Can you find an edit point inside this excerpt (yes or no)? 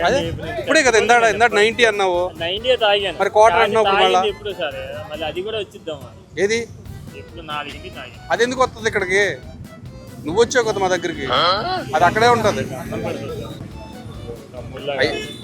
yes